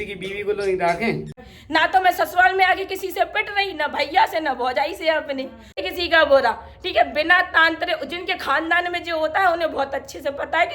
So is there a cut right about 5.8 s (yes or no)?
yes